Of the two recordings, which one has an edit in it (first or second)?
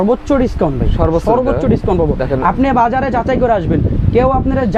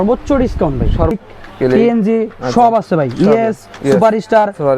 second